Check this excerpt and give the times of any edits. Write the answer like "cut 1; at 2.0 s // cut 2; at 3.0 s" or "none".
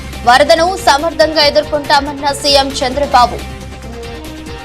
cut 1; at 3.4 s